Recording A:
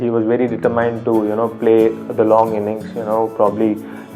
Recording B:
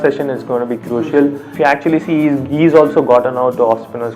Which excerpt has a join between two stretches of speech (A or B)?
B